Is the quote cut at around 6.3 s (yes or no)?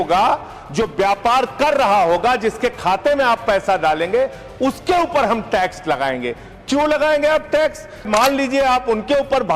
no